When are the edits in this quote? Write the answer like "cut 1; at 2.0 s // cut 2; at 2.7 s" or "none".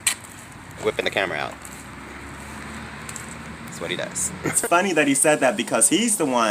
cut 1; at 4.6 s